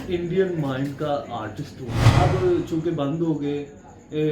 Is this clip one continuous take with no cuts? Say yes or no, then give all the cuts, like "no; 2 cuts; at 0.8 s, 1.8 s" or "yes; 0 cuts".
no; 1 cut; at 2.0 s